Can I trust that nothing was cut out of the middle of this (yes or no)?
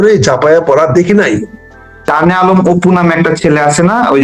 no